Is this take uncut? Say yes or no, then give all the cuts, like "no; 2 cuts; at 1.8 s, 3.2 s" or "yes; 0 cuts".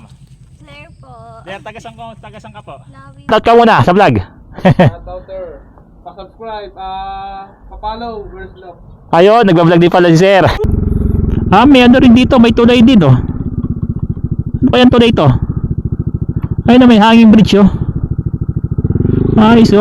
no; 2 cuts; at 3.3 s, 10.5 s